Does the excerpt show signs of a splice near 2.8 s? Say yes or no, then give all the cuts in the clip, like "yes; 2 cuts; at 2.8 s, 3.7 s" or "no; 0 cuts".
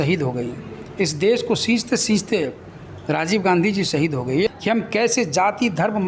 no; 1 cut; at 4.5 s